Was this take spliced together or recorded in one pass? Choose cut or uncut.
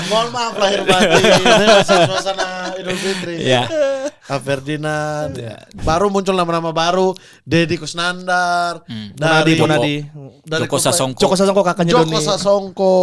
cut